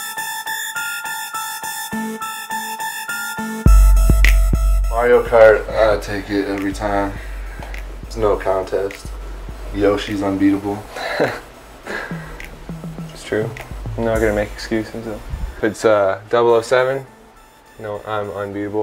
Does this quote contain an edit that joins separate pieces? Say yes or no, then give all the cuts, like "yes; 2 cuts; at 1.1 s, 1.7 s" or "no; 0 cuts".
no; 0 cuts